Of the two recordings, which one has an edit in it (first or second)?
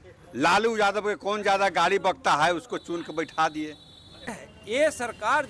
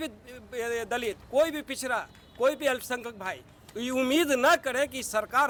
first